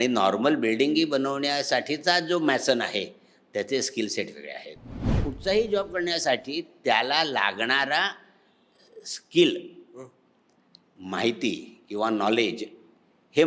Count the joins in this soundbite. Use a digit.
1